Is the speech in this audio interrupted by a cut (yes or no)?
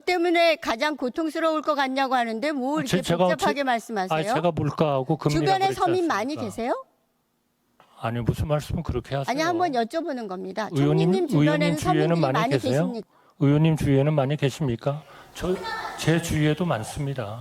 no